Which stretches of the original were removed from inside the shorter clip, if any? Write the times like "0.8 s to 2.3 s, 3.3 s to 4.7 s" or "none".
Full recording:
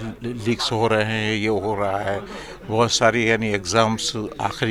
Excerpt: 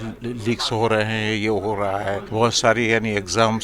2.2 s to 2.6 s